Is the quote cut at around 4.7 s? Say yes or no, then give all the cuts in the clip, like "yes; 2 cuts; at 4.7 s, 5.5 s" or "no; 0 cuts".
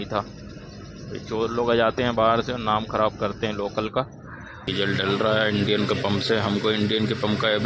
yes; 1 cut; at 4.7 s